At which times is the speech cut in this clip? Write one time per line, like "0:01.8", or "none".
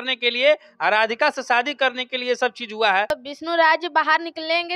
0:03.1